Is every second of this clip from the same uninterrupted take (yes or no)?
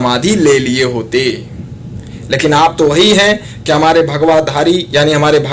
yes